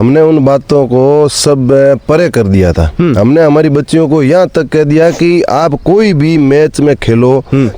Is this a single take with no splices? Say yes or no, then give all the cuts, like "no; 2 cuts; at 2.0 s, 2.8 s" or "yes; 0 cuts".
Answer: yes; 0 cuts